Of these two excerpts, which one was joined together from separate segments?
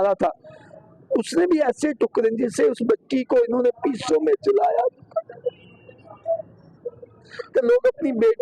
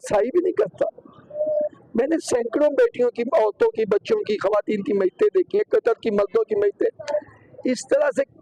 first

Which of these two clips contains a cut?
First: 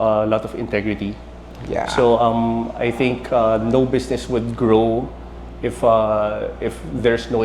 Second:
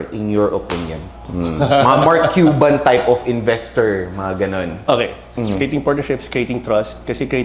second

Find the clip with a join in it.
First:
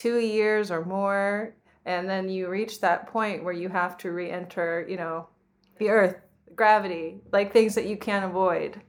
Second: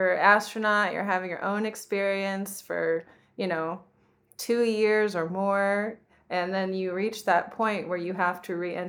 first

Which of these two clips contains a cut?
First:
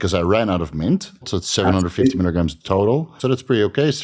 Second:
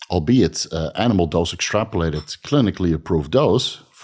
first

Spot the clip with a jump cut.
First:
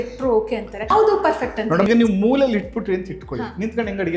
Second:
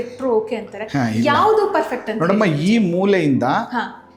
first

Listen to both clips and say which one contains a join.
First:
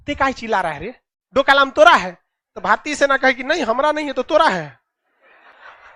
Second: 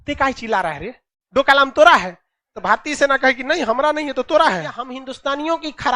second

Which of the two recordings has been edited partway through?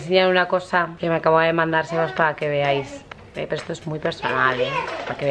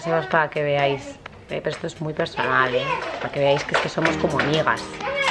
first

